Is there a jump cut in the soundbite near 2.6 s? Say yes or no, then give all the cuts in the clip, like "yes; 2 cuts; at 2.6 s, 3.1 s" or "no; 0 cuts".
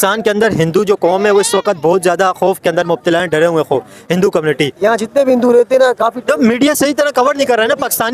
no; 1 cut; at 4.7 s